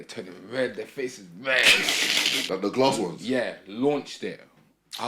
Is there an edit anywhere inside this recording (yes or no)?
yes